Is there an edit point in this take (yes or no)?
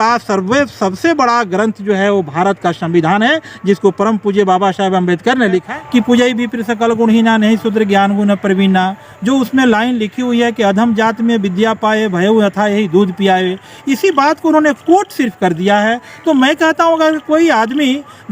yes